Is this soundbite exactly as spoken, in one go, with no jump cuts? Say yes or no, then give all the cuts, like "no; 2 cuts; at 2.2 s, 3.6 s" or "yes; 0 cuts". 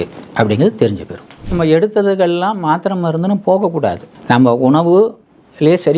no; 2 cuts; at 1.4 s, 4.1 s